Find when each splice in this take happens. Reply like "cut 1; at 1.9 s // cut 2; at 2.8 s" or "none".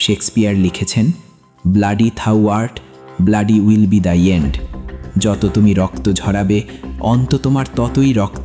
none